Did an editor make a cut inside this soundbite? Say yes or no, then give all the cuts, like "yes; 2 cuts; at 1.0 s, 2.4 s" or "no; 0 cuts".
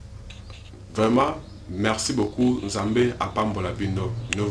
no; 0 cuts